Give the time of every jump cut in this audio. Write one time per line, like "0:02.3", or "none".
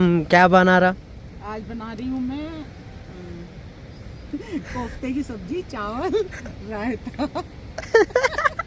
none

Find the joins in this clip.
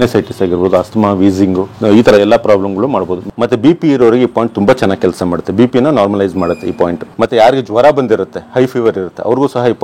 0:01.7
0:03.2
0:07.0

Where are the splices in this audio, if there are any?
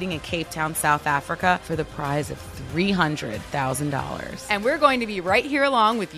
0:01.6

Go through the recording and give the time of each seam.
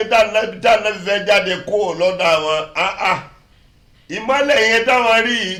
none

